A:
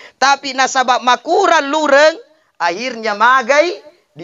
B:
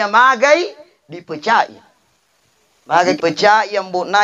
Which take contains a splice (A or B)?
B